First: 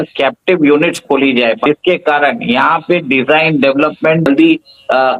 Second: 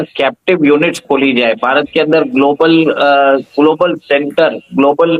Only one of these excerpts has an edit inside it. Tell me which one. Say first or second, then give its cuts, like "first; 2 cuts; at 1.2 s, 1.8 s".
first; 2 cuts; at 1.6 s, 4.3 s